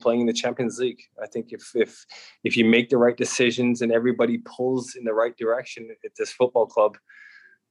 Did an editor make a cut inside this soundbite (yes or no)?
no